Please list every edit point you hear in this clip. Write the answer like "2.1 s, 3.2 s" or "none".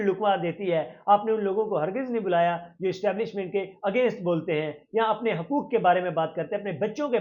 none